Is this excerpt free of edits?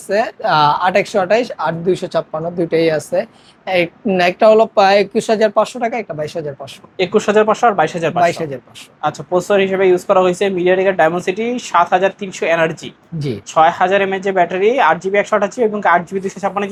yes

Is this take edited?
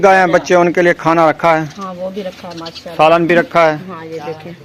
no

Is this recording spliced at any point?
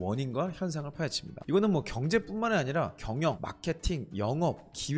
yes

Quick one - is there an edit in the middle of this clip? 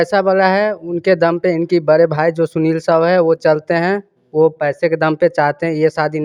no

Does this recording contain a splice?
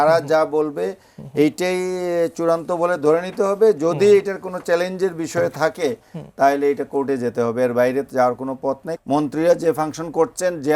yes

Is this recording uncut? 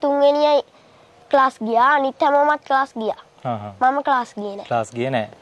yes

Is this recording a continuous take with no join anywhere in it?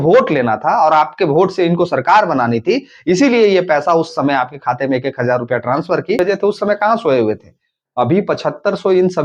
no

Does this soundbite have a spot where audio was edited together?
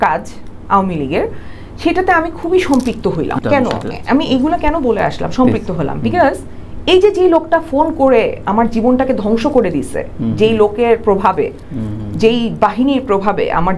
yes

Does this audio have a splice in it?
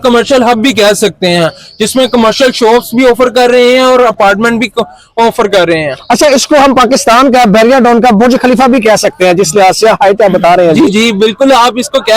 no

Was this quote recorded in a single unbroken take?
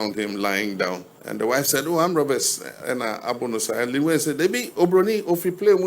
no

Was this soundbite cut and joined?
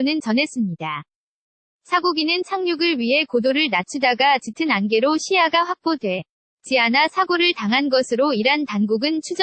no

